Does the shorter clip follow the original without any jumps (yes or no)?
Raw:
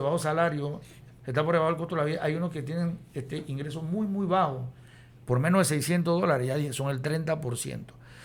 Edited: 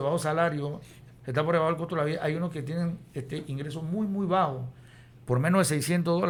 yes